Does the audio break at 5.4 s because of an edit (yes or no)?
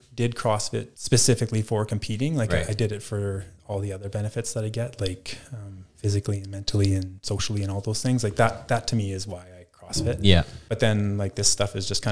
no